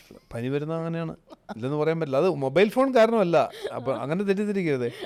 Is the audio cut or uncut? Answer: uncut